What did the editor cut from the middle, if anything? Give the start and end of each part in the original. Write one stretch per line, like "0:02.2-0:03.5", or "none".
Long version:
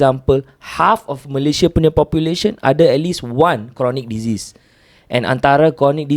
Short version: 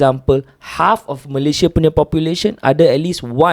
none